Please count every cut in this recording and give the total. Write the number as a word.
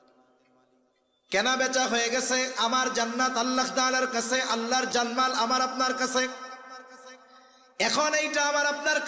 one